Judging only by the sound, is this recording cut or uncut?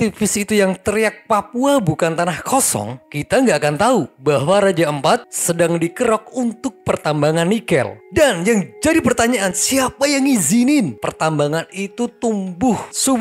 uncut